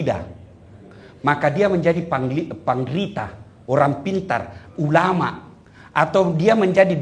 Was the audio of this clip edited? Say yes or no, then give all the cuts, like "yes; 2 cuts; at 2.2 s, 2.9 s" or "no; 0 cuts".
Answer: no; 0 cuts